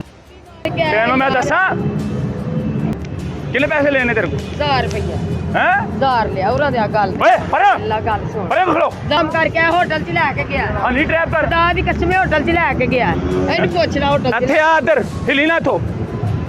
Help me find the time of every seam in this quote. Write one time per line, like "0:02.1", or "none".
0:02.9
0:09.2